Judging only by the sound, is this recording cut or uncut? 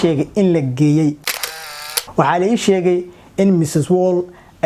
cut